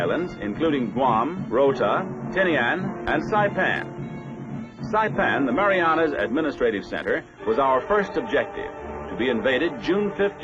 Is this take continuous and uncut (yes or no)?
no